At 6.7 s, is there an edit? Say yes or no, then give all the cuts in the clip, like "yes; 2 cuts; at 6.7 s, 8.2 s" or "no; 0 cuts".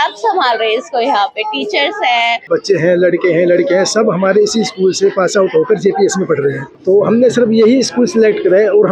yes; 2 cuts; at 2.4 s, 6.7 s